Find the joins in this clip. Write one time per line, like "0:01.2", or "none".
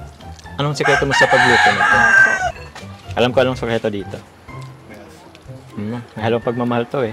0:02.6